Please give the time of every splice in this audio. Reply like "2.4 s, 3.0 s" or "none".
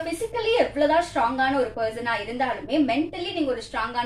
none